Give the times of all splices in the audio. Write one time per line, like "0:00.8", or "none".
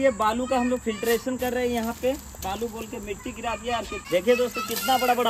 0:02.5
0:04.0